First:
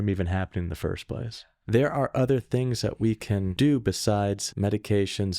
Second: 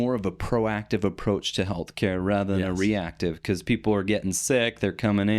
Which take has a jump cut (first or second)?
first